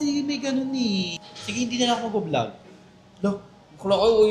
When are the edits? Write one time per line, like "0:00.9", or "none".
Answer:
0:01.2